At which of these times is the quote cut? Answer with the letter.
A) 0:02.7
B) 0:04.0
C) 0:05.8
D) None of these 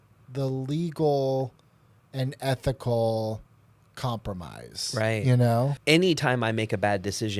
C